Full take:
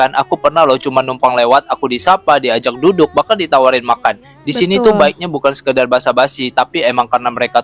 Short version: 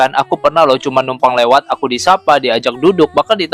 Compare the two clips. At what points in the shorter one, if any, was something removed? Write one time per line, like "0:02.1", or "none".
none